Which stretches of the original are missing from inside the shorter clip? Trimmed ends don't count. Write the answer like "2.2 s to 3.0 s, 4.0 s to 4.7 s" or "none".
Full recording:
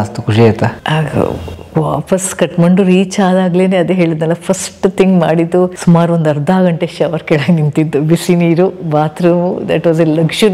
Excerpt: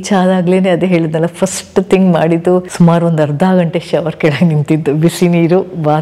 none